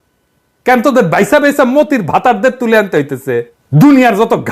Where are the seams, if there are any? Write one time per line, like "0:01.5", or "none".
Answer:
0:03.6